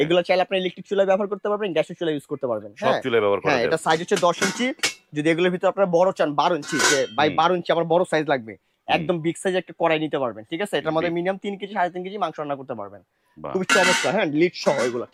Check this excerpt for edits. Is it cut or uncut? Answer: uncut